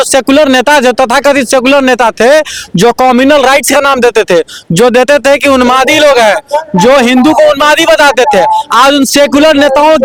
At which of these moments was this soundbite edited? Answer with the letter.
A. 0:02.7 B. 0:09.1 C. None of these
C